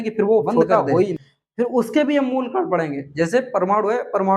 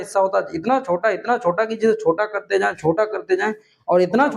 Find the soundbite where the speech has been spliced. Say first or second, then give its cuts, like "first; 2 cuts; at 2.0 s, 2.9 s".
first; 1 cut; at 1.2 s